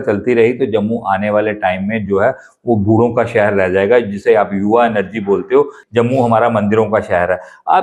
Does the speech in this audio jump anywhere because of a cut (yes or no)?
yes